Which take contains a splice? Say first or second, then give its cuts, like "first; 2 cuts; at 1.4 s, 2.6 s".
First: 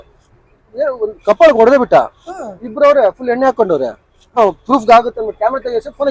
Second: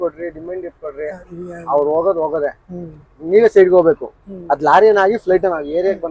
first; 1 cut; at 4.4 s